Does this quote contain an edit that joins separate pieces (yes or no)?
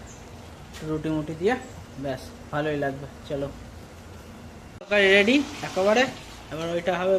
yes